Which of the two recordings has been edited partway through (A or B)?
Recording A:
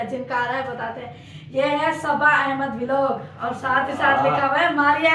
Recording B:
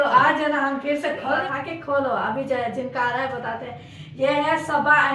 B